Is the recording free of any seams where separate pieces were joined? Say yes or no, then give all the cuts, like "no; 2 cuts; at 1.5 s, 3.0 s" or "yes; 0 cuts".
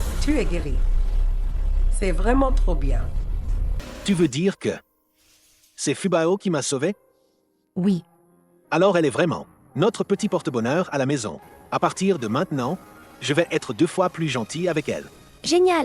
no; 1 cut; at 3.8 s